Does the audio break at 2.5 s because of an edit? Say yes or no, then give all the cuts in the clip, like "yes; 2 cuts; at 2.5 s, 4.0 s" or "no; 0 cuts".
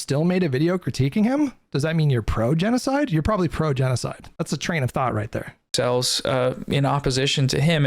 no; 2 cuts; at 4.2 s, 5.6 s